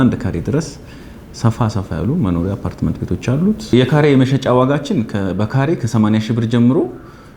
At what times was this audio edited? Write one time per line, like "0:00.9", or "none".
0:03.7